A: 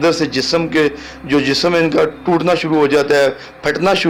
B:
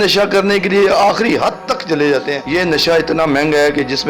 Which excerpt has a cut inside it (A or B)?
B